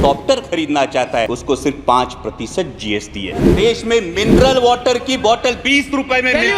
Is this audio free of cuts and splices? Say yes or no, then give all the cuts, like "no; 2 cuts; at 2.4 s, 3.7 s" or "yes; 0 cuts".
no; 2 cuts; at 1.3 s, 3.5 s